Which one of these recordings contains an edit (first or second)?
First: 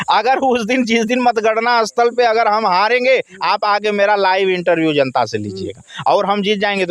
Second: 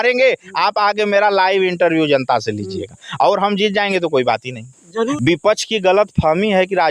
second